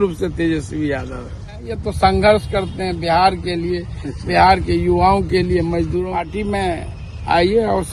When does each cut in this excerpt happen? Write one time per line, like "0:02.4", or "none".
0:01.8
0:06.1